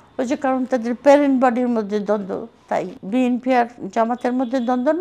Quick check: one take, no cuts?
no; 1 cut; at 3.0 s

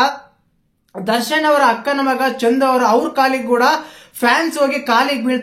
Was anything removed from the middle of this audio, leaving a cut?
no; 0 cuts

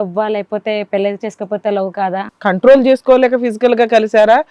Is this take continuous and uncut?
no; 1 cut; at 2.3 s

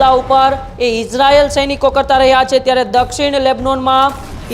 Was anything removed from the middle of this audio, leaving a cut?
no; 0 cuts

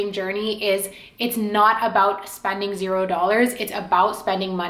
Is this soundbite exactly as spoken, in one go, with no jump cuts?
yes; 0 cuts

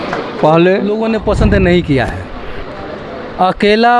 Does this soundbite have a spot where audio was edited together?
yes; 1 cut; at 0.9 s

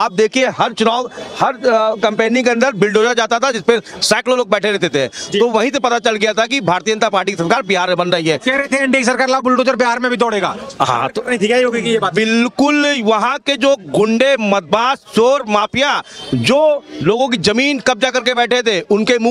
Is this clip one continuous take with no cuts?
yes; 0 cuts

